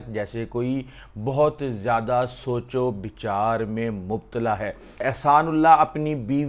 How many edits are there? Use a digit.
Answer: 1